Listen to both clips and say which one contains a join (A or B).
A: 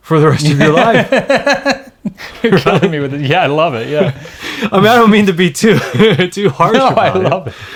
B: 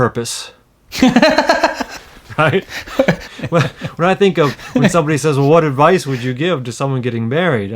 B